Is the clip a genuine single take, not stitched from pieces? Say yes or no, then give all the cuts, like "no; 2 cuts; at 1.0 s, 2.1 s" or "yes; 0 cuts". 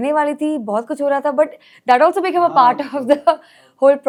yes; 0 cuts